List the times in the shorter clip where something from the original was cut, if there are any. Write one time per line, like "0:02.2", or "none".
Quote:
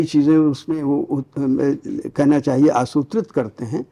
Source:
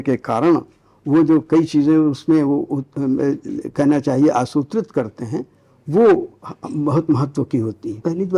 none